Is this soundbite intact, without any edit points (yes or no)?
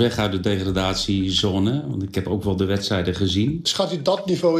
no